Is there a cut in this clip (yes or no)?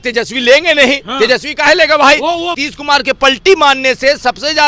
yes